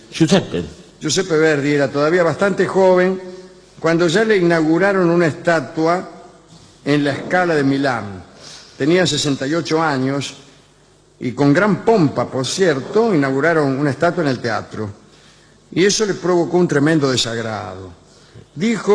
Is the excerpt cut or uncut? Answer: uncut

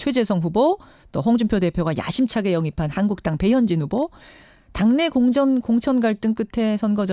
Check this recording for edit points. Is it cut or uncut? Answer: uncut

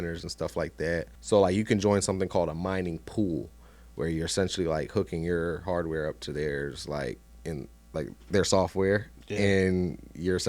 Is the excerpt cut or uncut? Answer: cut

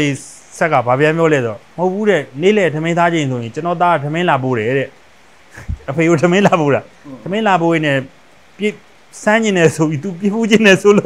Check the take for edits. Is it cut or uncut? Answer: uncut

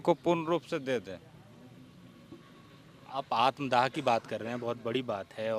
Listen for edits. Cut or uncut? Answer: uncut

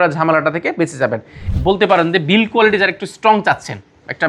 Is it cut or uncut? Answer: cut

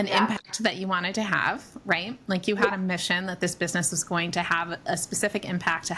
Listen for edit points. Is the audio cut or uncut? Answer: uncut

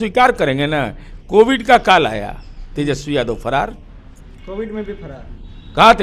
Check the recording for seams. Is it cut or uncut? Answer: uncut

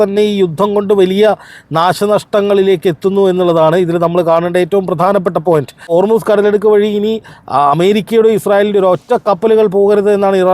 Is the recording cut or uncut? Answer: cut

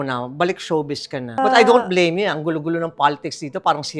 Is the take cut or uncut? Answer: cut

